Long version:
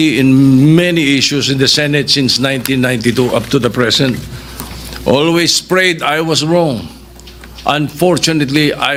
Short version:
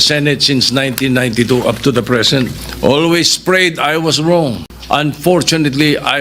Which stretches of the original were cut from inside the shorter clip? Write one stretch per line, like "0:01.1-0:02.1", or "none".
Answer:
0:04.3-0:04.9
0:06.9-0:07.4